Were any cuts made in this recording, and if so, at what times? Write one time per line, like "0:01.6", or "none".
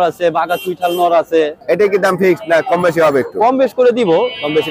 0:01.6